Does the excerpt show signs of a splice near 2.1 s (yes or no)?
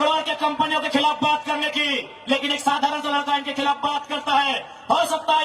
no